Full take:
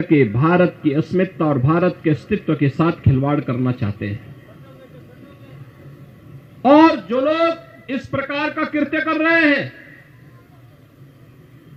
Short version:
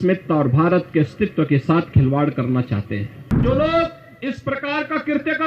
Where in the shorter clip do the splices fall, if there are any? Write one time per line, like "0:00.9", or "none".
0:03.4